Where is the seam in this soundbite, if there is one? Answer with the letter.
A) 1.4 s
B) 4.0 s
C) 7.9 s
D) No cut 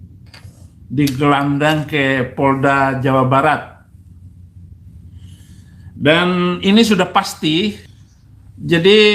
C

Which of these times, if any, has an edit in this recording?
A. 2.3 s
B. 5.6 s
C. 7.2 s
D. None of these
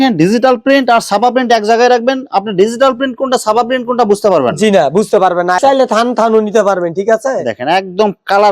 B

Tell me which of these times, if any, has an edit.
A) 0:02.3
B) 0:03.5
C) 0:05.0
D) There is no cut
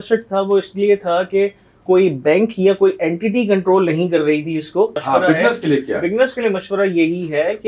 C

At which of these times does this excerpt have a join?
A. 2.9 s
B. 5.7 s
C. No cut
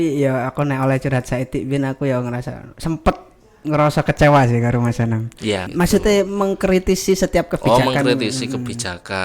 B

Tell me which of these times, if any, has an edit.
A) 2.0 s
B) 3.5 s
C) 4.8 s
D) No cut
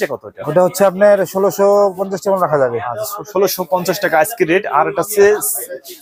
D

